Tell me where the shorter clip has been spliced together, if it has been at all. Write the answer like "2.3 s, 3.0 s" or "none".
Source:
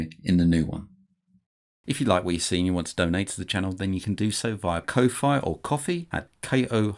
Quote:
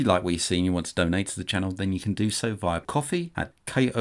2.8 s